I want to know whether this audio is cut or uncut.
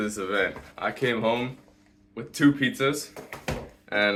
uncut